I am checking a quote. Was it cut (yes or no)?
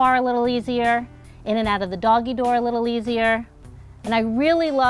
yes